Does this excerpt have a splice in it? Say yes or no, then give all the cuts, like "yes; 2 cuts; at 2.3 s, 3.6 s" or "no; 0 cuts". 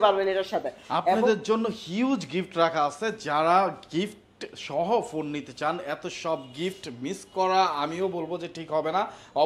no; 0 cuts